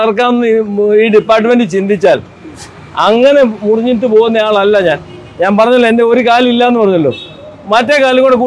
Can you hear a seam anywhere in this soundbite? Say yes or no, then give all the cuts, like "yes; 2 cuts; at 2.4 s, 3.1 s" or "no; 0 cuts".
no; 0 cuts